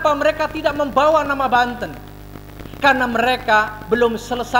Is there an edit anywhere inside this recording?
no; 0 cuts

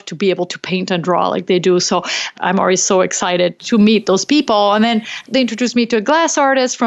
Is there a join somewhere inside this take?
yes; 3 cuts; at 2.3 s, 3.6 s, 5.2 s

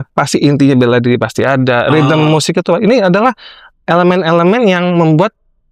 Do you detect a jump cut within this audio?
no; 0 cuts

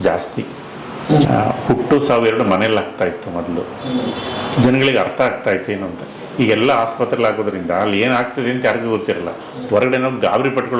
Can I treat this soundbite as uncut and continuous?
no; 1 cut; at 1.2 s

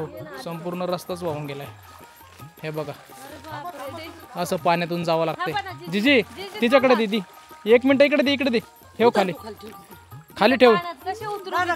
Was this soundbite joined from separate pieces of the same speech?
no; 0 cuts

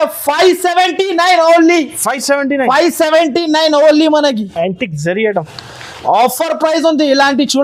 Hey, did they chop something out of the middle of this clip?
no; 0 cuts

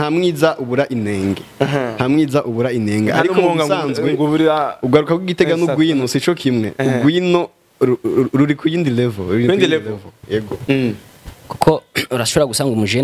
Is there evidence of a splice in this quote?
yes; 1 cut; at 10.6 s

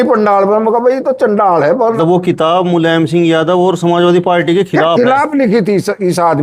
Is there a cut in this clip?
yes; 1 cut; at 2.0 s

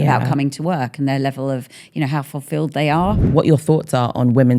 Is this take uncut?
no; 1 cut; at 3.2 s

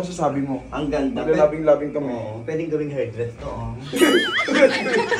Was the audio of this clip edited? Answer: no; 0 cuts

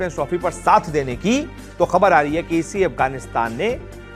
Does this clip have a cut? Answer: no; 0 cuts

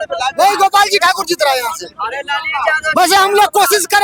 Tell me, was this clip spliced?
no; 0 cuts

